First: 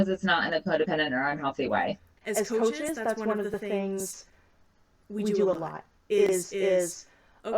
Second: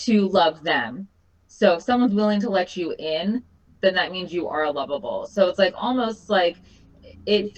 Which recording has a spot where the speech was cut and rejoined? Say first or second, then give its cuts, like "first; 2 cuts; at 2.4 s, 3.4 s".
first; 1 cut; at 2.1 s